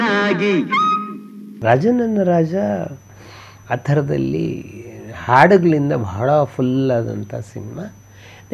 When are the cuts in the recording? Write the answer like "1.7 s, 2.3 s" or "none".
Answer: none